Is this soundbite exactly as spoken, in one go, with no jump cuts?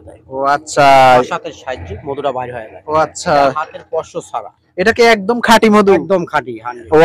yes; 0 cuts

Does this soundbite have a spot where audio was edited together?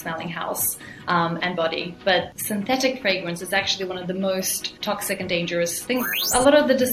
yes; 3 cuts; at 2.3 s, 4.7 s, 6.2 s

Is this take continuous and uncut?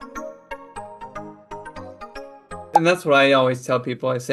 no; 1 cut; at 2.5 s

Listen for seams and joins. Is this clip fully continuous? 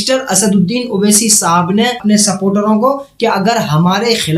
no; 1 cut; at 2.0 s

